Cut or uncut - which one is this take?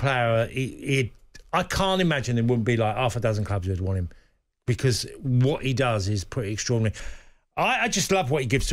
cut